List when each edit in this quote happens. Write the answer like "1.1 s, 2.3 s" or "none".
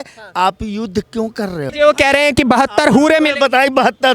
1.7 s